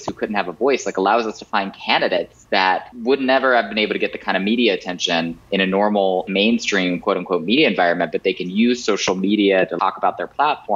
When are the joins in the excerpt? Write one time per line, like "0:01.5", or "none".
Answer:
0:02.7
0:05.4
0:06.3
0:09.7